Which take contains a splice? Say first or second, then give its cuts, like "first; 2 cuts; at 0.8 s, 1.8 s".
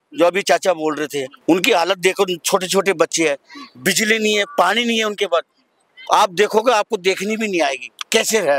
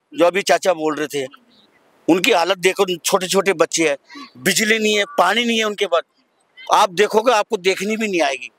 first; 1 cut; at 1.3 s